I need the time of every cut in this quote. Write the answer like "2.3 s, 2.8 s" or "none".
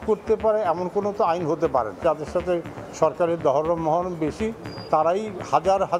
2.0 s